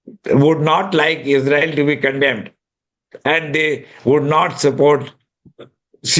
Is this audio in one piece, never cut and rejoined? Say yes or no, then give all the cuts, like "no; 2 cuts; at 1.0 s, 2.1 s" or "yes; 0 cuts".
yes; 0 cuts